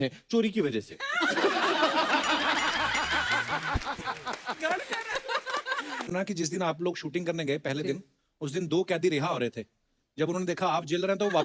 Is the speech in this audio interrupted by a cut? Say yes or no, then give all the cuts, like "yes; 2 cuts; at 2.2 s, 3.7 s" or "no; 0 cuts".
yes; 1 cut; at 6.1 s